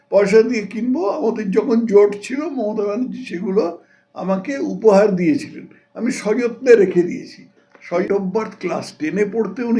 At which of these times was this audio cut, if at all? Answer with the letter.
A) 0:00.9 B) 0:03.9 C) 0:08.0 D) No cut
C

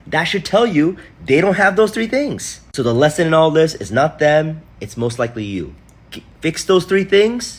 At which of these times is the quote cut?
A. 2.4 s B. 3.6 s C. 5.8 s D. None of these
C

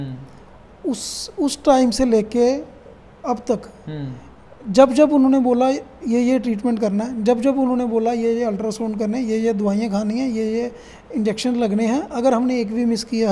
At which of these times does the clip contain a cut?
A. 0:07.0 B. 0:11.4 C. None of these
C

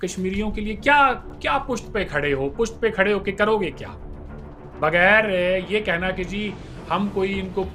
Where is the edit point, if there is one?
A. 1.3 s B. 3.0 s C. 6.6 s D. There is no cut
A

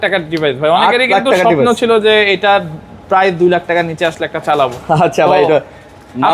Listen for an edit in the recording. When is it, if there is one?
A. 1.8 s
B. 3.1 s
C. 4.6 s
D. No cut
D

